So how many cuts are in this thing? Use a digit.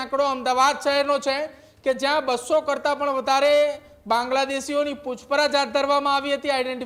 0